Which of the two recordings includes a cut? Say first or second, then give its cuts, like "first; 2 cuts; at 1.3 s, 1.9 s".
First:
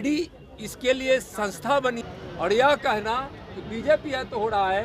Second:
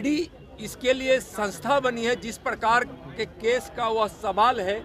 first; 1 cut; at 2.0 s